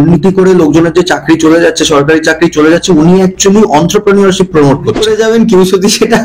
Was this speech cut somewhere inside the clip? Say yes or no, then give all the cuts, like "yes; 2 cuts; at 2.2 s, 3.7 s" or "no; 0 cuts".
yes; 1 cut; at 5.0 s